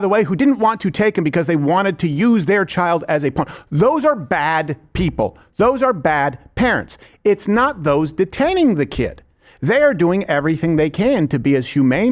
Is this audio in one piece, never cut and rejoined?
yes; 0 cuts

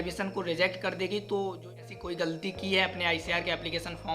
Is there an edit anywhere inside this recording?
yes; 1 cut; at 1.8 s

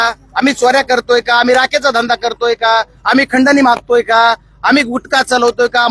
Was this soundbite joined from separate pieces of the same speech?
no; 0 cuts

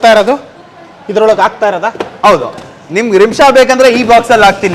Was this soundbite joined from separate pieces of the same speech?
no; 0 cuts

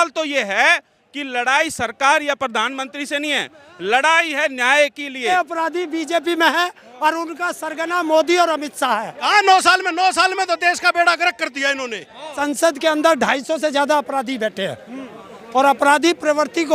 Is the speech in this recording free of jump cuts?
no; 3 cuts; at 5.3 s, 9.2 s, 12.4 s

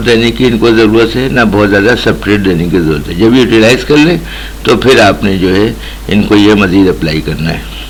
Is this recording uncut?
yes; 0 cuts

